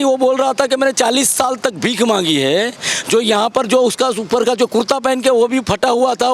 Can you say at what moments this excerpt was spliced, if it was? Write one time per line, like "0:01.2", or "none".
none